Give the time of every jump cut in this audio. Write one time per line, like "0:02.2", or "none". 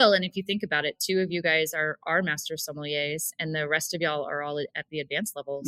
none